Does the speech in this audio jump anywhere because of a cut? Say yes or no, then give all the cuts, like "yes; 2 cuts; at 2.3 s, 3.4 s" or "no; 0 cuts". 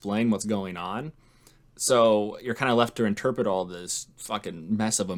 no; 0 cuts